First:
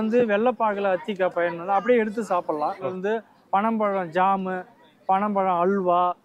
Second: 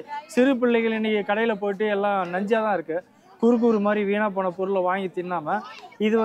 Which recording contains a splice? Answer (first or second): first